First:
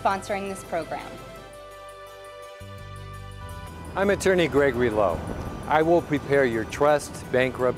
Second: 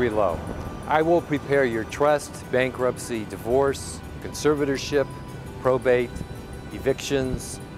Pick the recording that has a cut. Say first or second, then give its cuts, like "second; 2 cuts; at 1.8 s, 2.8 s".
first; 1 cut; at 3.4 s